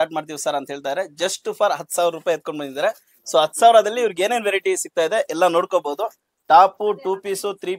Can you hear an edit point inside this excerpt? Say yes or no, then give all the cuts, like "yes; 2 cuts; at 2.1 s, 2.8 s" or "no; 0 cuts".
no; 0 cuts